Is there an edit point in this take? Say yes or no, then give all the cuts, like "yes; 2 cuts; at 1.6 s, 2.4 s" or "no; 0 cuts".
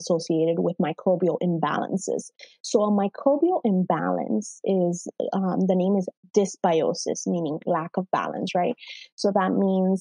no; 0 cuts